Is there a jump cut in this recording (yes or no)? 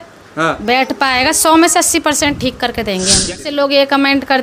yes